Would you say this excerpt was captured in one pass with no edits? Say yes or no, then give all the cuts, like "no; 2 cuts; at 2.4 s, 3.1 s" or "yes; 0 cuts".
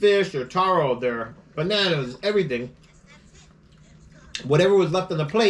yes; 0 cuts